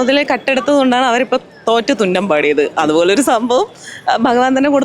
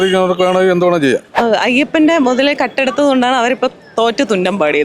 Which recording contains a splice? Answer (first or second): second